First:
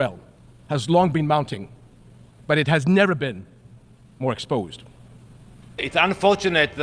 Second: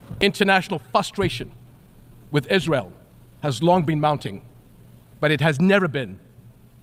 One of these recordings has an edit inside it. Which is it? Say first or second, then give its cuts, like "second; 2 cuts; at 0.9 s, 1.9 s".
first; 1 cut; at 5.8 s